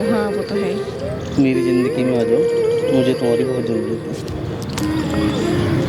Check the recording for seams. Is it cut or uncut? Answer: uncut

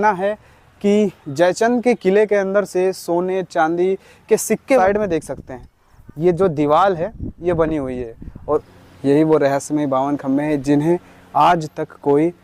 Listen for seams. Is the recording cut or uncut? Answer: cut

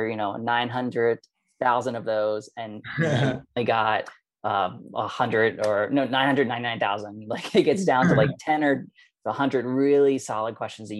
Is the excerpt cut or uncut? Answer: uncut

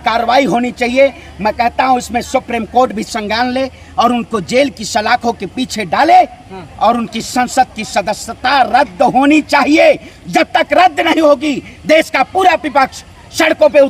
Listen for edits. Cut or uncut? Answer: uncut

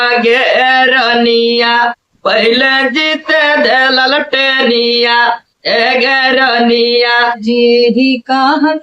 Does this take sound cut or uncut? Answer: cut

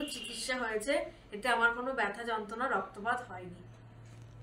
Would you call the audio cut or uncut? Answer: uncut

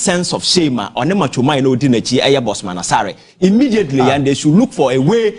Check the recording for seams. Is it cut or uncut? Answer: uncut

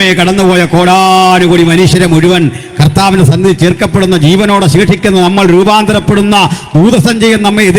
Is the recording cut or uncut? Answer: uncut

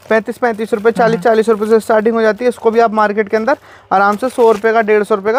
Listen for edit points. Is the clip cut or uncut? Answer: uncut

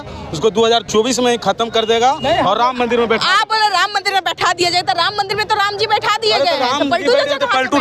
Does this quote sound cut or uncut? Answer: uncut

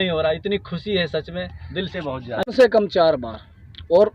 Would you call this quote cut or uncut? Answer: cut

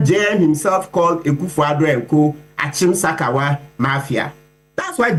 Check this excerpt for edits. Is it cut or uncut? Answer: uncut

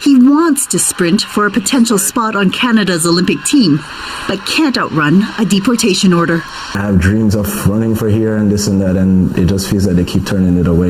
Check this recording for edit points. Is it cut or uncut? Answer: uncut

